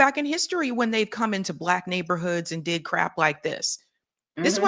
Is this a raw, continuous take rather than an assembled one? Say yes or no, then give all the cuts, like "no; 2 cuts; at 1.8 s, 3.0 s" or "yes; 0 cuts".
yes; 0 cuts